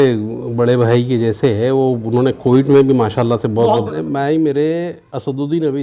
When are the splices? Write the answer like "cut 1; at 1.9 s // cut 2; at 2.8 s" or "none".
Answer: cut 1; at 3.9 s